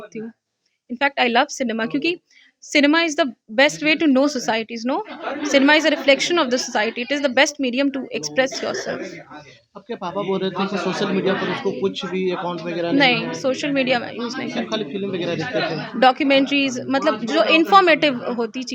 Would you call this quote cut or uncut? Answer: uncut